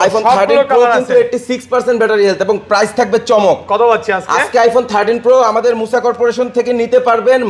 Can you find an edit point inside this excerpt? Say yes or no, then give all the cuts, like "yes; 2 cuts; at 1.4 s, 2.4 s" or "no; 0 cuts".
no; 0 cuts